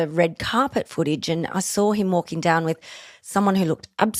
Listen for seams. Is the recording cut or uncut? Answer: uncut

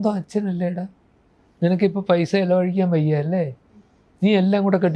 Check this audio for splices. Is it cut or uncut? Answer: uncut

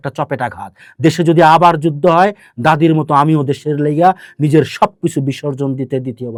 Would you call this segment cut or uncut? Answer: uncut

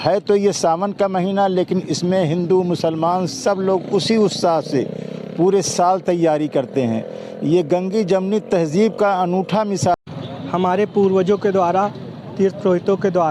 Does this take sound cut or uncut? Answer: cut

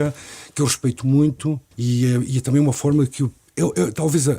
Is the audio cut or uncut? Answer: cut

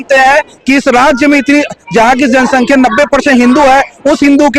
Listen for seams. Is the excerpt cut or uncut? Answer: uncut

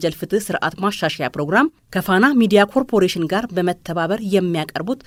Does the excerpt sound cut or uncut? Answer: uncut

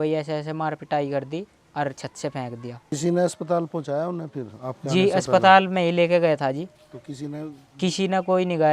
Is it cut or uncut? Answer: cut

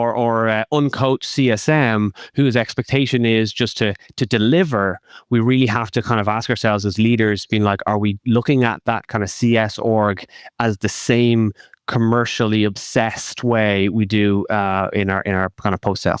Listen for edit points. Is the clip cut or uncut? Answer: uncut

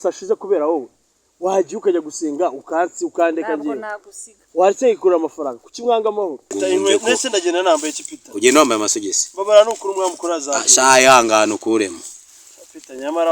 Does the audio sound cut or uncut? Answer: cut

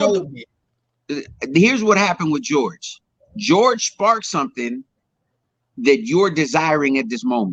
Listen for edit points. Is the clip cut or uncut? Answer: uncut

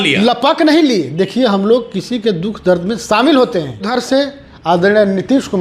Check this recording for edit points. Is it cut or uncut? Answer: cut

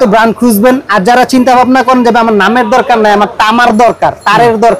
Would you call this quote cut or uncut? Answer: uncut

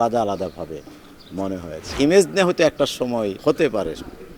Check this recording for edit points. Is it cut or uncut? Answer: cut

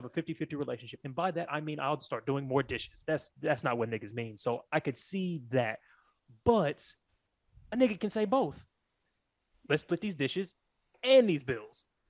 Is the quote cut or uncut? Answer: uncut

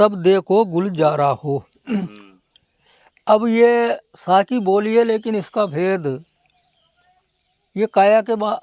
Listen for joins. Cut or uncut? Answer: uncut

